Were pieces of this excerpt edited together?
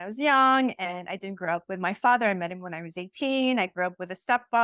no; 0 cuts

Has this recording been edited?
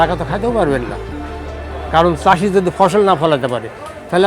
no; 0 cuts

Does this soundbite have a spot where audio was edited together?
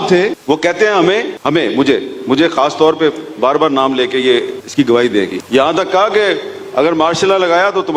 no; 0 cuts

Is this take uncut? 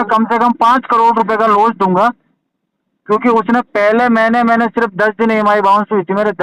yes; 0 cuts

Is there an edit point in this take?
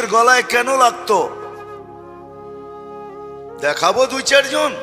no; 0 cuts

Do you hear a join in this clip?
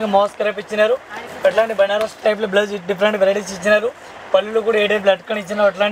no; 0 cuts

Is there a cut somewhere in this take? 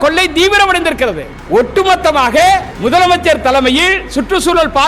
yes; 2 cuts; at 1.3 s, 2.7 s

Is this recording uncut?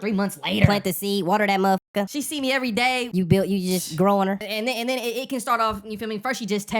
no; 3 cuts; at 2.1 s, 3.1 s, 4.5 s

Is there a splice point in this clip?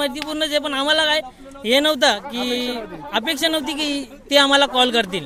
no; 0 cuts

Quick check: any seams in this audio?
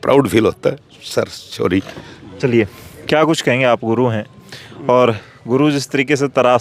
no; 0 cuts

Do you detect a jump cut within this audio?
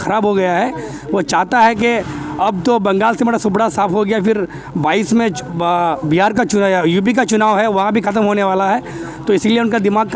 no; 0 cuts

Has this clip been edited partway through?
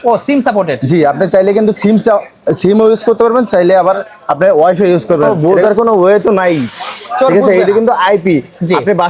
yes; 1 cut; at 5.4 s

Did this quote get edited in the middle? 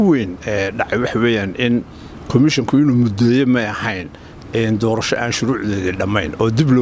no; 0 cuts

